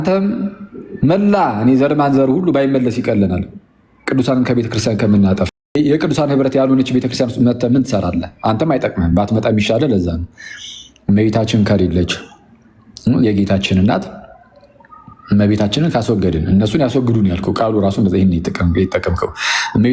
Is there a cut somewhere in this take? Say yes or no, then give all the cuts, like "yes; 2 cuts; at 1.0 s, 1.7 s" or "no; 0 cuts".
yes; 1 cut; at 5.6 s